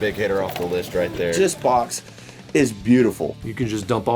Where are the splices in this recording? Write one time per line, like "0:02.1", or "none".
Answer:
0:01.4
0:03.3